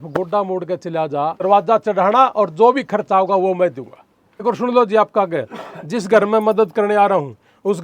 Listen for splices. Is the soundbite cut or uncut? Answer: cut